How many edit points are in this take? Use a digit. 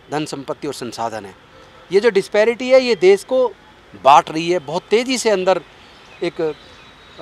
0